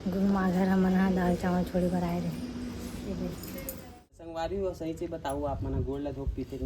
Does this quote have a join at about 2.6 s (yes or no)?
no